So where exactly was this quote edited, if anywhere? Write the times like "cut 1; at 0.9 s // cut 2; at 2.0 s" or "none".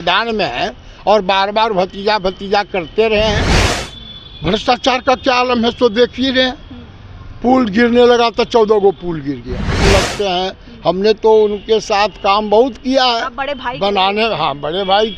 cut 1; at 3.6 s // cut 2; at 9.8 s